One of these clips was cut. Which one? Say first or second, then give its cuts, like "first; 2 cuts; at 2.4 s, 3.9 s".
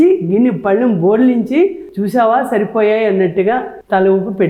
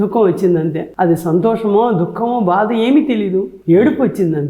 second; 1 cut; at 3.5 s